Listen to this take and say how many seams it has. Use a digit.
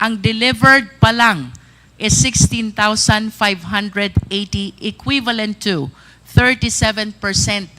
0